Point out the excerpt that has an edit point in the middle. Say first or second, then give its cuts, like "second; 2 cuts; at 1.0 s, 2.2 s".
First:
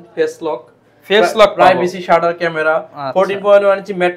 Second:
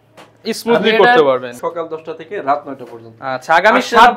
second; 1 cut; at 1.5 s